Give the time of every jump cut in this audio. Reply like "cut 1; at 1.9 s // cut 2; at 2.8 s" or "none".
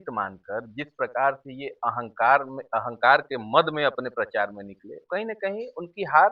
none